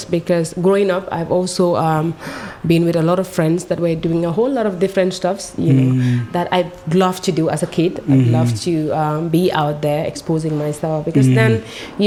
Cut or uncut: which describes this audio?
uncut